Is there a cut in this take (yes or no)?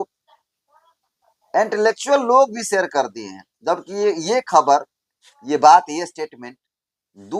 no